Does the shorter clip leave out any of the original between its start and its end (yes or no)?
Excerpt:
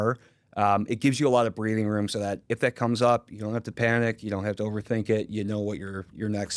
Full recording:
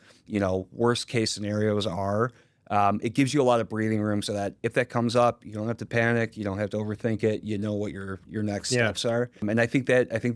no